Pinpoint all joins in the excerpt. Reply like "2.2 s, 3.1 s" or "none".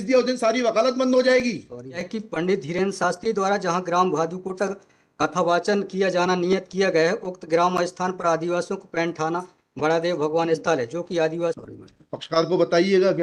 2.1 s, 11.6 s

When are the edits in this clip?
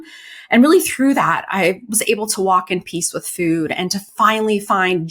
none

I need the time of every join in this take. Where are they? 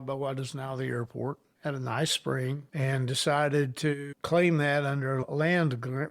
1.5 s, 2.6 s, 4.1 s

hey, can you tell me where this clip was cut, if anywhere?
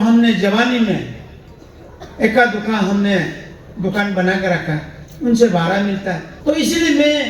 6.3 s

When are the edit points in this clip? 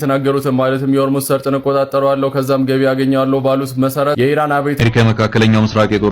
4.8 s

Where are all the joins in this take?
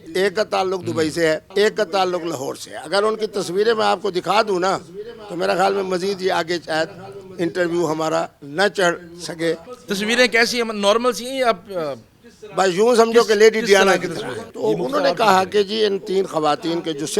1.5 s, 9.7 s, 14.5 s

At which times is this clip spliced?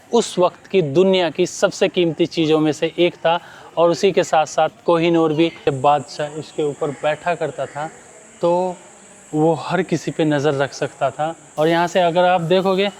5.6 s, 11.4 s

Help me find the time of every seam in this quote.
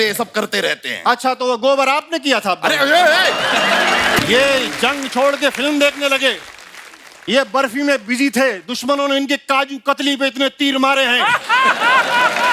4.2 s

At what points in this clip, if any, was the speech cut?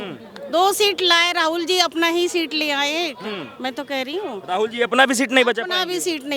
none

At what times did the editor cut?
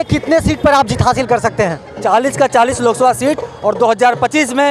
none

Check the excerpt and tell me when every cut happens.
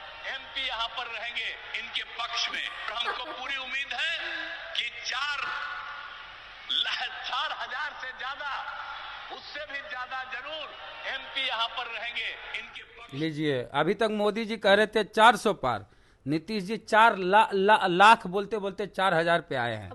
none

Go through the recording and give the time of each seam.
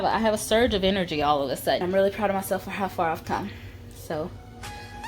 1.8 s

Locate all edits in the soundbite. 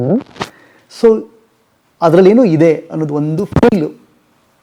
none

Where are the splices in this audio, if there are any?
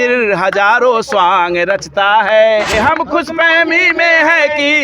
2.7 s

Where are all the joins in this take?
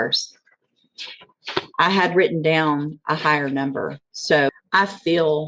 4.5 s

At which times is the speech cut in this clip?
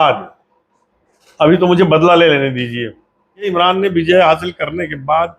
3.5 s

